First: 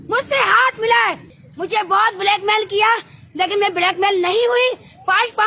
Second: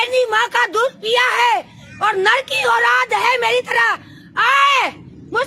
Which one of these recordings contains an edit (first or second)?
first